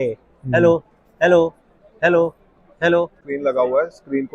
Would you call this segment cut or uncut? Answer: cut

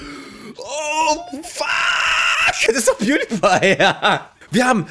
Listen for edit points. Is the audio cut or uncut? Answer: cut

